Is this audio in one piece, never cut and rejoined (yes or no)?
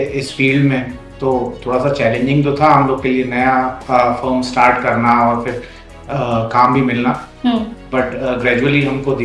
yes